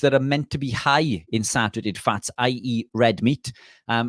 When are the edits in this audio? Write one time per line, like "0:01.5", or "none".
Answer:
none